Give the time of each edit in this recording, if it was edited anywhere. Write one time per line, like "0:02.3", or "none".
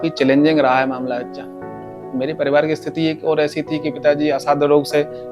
none